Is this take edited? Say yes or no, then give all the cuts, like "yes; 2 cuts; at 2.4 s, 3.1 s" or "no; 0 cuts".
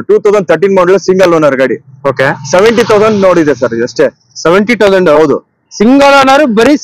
no; 0 cuts